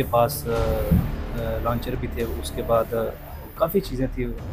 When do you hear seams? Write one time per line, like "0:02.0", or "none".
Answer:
none